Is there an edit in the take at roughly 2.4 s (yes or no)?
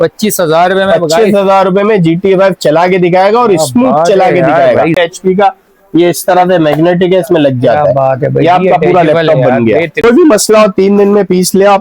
no